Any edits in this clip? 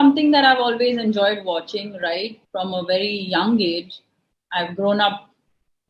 yes; 1 cut; at 2.4 s

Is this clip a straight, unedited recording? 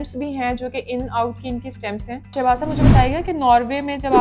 no; 1 cut; at 2.3 s

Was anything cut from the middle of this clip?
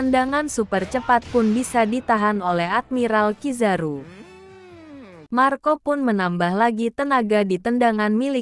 no; 0 cuts

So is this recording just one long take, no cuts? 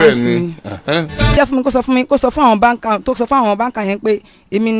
no; 1 cut; at 1.4 s

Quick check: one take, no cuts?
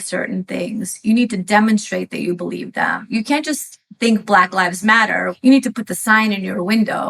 no; 1 cut; at 5.3 s

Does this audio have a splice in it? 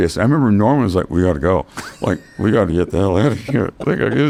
no; 0 cuts

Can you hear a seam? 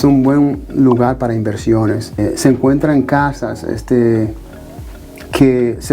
yes; 1 cut; at 2.2 s

